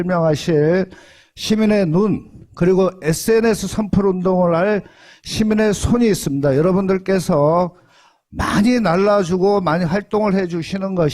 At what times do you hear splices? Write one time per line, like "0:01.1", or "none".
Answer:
0:06.5